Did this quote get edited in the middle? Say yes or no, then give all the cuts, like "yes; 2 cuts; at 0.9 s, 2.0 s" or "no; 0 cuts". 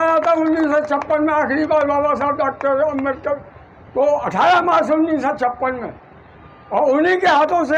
no; 0 cuts